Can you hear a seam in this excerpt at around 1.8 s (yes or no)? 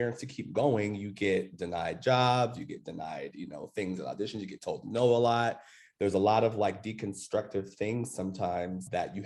no